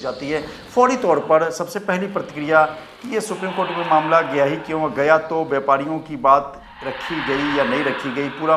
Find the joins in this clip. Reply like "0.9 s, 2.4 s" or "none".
none